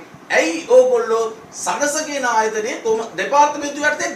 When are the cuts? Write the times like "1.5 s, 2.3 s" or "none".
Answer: none